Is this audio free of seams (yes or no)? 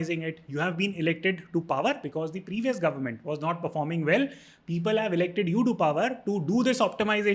yes